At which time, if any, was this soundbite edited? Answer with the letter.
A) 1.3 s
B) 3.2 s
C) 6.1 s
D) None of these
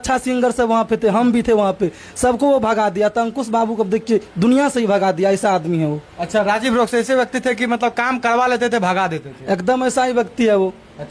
D